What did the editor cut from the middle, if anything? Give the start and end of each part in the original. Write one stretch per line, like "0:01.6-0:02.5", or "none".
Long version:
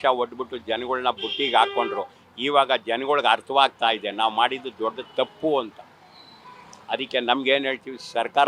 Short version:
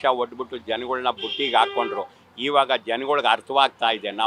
none